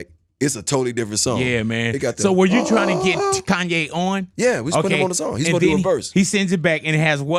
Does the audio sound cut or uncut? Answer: uncut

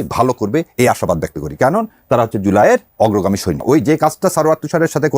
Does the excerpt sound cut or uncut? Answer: cut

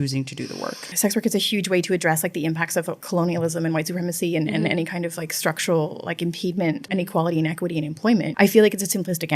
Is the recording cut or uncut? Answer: cut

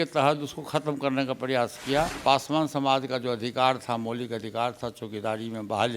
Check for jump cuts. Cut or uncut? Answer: cut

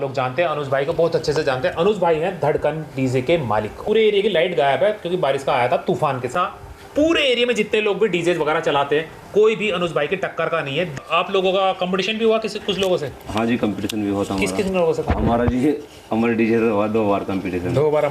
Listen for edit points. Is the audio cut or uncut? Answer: cut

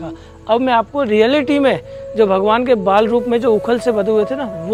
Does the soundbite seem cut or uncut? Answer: uncut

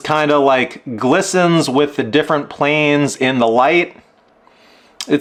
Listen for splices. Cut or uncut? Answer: uncut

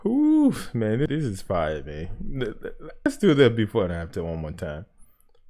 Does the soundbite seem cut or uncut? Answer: cut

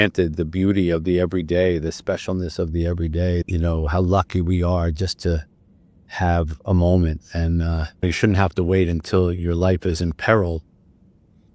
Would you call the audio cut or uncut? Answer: cut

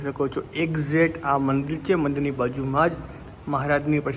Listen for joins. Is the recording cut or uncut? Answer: uncut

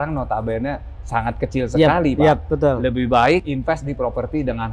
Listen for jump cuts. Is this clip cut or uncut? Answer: cut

